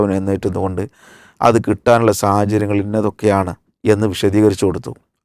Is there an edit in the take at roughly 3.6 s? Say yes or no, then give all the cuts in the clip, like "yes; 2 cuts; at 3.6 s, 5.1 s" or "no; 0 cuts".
yes; 1 cut; at 3.6 s